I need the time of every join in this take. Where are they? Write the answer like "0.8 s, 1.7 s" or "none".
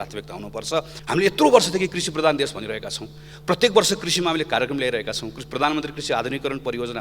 0.9 s